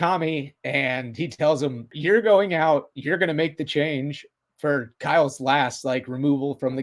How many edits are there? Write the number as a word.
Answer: one